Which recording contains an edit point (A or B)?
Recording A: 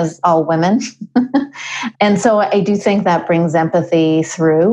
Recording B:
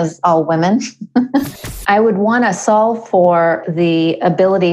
B